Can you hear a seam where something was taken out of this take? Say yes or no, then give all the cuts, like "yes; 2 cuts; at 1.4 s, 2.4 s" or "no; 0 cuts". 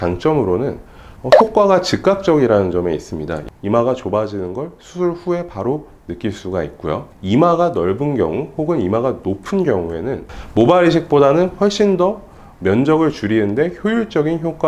no; 0 cuts